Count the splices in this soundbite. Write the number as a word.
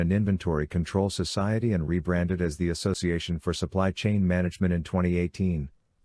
one